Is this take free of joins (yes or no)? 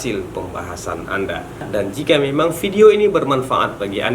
no